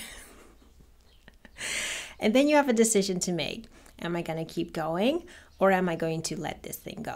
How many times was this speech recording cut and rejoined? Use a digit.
0